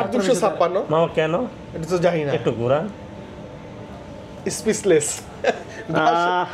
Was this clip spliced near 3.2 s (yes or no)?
no